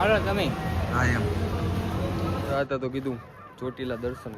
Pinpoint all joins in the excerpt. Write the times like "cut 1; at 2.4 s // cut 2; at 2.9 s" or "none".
cut 1; at 2.5 s